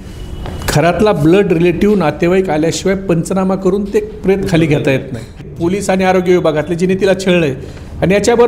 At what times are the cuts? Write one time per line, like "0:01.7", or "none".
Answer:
0:05.5

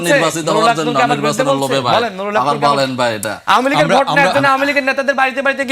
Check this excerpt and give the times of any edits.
0:03.3

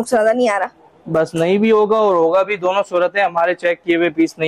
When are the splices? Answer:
none

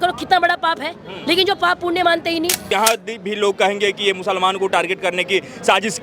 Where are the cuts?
0:02.6

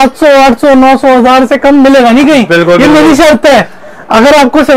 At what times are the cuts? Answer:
none

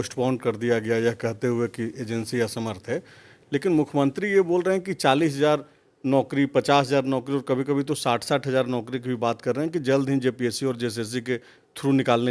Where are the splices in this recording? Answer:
none

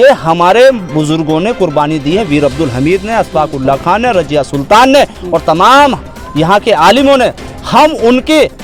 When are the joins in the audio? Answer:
none

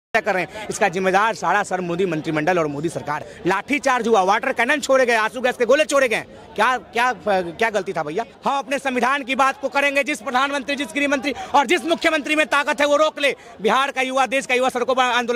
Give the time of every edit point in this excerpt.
0:03.3
0:08.3

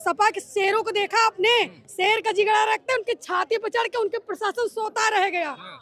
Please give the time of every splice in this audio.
none

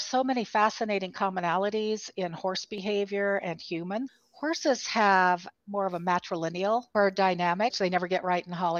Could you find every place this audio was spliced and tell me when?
0:04.1
0:05.5
0:06.9
0:07.8

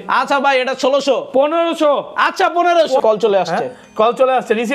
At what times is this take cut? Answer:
0:03.0

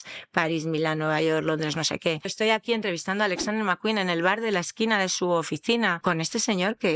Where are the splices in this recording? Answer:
0:02.3
0:06.0

